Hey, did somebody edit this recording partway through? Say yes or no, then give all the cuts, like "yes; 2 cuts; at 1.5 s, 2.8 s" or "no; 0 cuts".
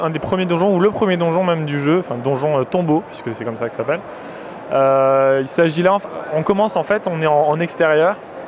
no; 0 cuts